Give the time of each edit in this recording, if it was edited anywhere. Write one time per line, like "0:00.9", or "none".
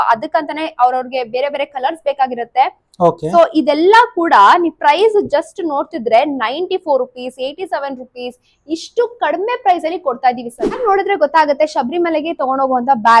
0:10.7